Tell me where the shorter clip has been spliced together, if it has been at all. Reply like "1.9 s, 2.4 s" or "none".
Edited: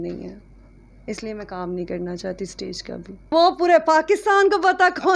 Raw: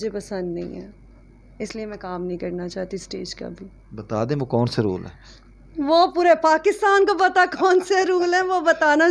3.3 s